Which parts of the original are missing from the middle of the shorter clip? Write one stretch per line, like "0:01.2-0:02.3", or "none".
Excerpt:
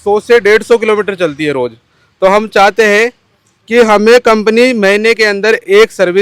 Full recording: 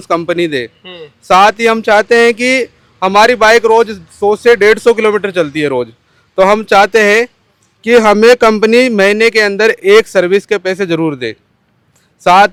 none

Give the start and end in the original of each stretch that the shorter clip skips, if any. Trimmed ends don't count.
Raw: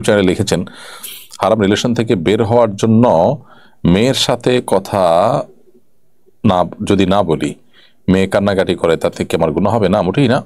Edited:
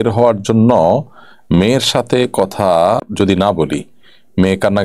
0:05.3-0:06.7

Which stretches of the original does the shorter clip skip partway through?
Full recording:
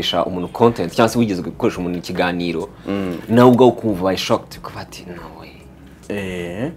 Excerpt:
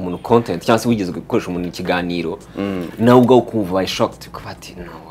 none

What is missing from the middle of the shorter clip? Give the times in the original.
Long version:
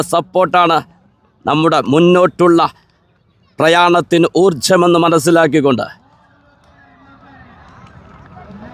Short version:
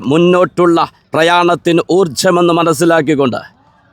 0:02.8-0:03.4

